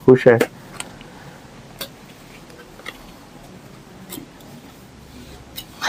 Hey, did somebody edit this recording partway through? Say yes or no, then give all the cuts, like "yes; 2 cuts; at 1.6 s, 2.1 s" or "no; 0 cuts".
no; 0 cuts